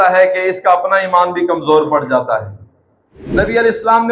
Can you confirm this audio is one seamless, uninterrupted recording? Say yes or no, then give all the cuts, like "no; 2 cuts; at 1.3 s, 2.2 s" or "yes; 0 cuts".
no; 1 cut; at 3.2 s